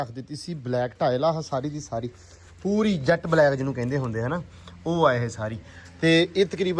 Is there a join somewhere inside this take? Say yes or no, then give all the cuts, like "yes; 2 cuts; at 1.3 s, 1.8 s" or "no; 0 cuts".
no; 0 cuts